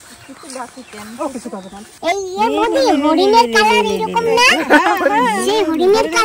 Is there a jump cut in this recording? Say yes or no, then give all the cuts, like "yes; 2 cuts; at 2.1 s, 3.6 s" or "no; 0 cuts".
yes; 1 cut; at 1.8 s